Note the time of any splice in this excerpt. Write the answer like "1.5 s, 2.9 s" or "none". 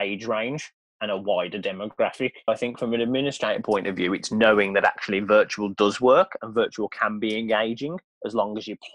2.5 s